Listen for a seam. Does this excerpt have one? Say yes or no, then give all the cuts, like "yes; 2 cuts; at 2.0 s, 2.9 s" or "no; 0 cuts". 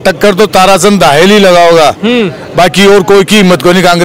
no; 0 cuts